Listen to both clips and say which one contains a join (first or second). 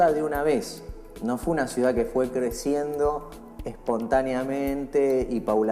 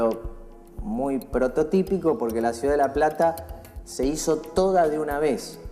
second